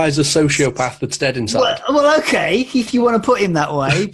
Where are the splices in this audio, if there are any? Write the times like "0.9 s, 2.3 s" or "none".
none

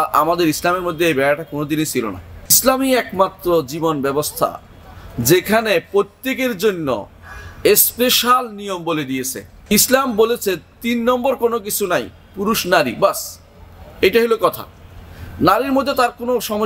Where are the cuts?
2.6 s, 9.7 s

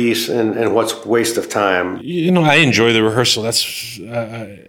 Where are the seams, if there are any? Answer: none

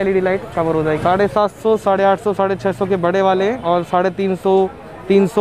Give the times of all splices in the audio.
1.0 s

